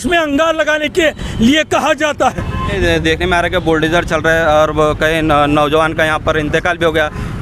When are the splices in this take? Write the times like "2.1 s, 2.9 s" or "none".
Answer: 2.7 s